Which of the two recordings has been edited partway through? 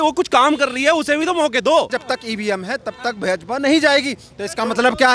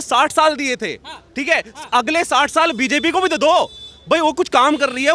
first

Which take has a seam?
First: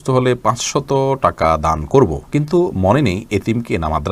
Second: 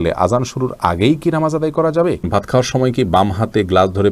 second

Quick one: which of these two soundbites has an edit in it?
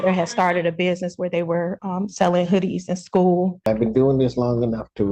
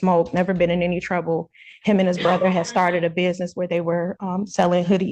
first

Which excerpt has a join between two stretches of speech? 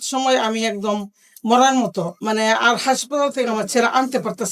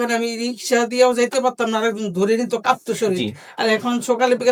first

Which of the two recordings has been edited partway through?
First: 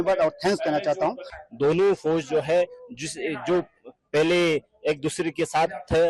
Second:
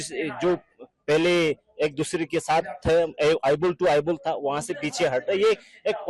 first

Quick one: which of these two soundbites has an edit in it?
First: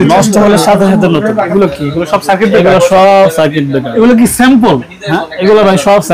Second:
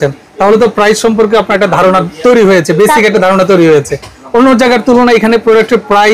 first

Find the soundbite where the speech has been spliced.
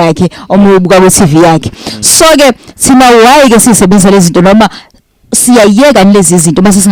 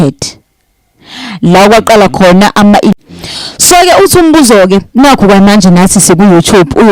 second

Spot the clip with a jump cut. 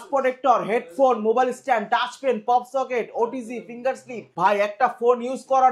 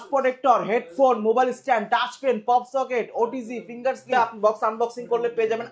second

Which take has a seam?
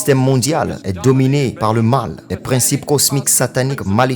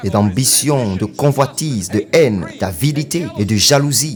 first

